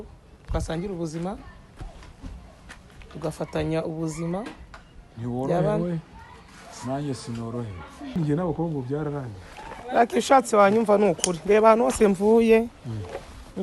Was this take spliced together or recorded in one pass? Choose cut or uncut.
cut